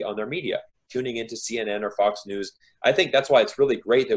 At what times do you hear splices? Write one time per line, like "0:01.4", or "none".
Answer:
0:02.6